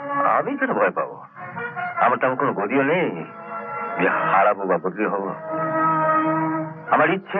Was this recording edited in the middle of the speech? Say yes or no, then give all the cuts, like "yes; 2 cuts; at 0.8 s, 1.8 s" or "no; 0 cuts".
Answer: no; 0 cuts